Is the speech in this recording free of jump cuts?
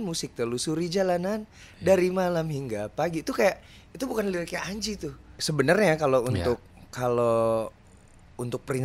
no; 1 cut; at 5.4 s

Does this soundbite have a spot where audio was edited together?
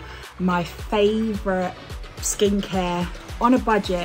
no; 0 cuts

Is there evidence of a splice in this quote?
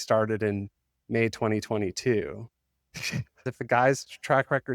yes; 1 cut; at 3.5 s

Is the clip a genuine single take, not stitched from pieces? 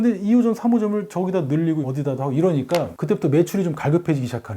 no; 1 cut; at 1.8 s

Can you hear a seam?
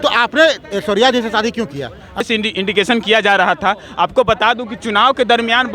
yes; 1 cut; at 2.2 s

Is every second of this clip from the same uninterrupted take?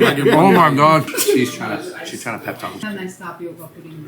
no; 1 cut; at 1.1 s

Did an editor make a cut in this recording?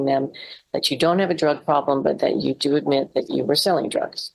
no; 0 cuts

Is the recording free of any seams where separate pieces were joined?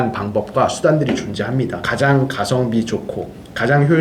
no; 1 cut; at 1.8 s

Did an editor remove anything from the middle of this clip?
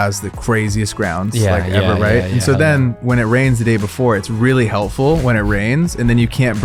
no; 0 cuts

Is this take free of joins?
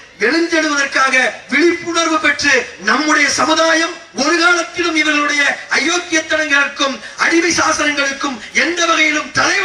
yes; 0 cuts

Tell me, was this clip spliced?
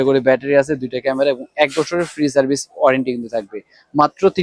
no; 0 cuts

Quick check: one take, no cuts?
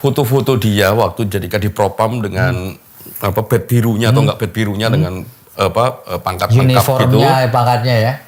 yes; 0 cuts

